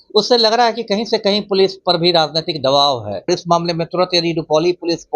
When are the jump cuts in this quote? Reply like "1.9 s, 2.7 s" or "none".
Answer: 3.3 s